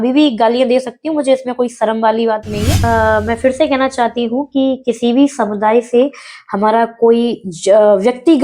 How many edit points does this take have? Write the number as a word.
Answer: one